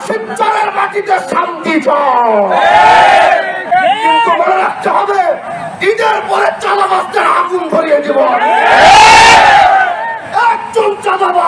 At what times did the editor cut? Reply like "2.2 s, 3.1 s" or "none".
3.7 s